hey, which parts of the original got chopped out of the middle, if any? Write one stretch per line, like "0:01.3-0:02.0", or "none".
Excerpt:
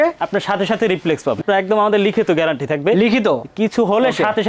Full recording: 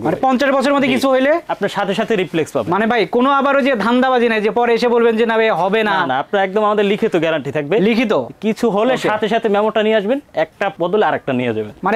0:02.7-0:06.2